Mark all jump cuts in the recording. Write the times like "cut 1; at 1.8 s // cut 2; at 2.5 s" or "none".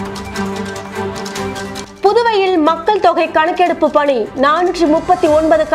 cut 1; at 1.4 s